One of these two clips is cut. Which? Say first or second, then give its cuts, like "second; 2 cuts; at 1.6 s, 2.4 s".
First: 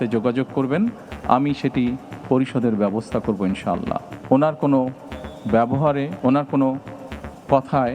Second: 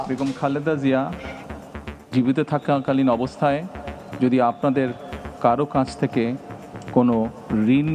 first; 2 cuts; at 4.1 s, 6.1 s